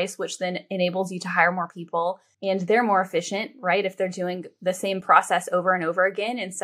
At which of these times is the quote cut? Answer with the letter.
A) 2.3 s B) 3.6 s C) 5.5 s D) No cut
A